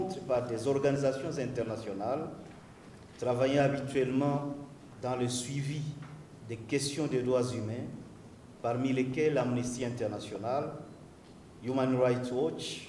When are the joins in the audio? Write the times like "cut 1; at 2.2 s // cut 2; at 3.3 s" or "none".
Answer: none